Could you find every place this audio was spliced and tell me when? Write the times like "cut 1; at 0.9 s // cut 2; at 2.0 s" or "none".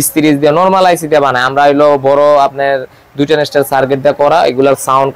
none